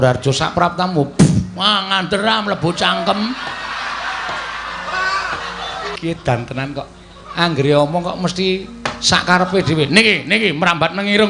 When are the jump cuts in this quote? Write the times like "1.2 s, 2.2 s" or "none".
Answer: 6.0 s

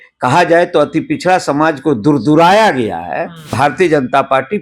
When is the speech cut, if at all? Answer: 3.5 s

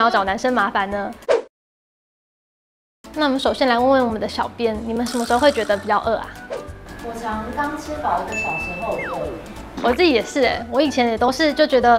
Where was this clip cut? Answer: none

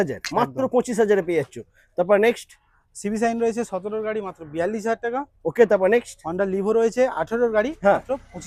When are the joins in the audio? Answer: none

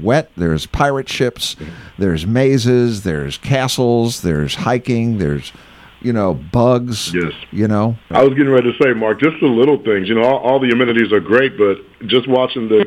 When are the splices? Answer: 8.1 s

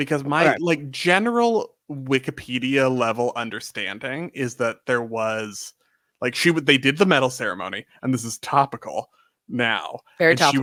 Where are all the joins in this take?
none

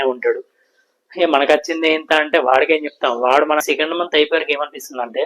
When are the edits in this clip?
3.6 s

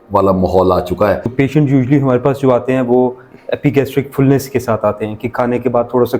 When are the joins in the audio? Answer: 1.3 s

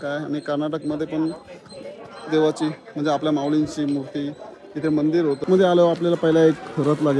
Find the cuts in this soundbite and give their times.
5.4 s

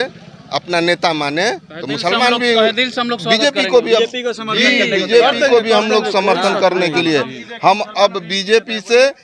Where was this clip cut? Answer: none

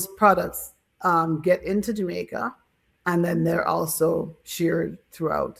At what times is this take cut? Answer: none

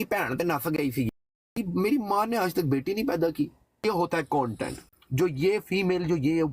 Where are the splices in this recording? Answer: 1.6 s, 3.8 s

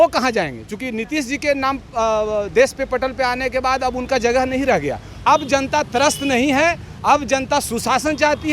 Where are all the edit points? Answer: 5.1 s

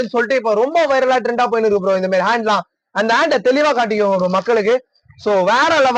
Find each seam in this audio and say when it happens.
none

